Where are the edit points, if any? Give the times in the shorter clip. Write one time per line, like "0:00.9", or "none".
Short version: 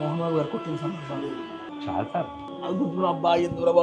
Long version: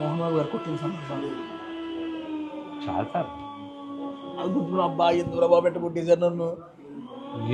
0:01.7
0:02.5